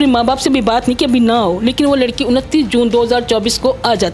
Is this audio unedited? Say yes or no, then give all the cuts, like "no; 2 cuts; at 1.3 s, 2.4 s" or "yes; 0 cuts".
yes; 0 cuts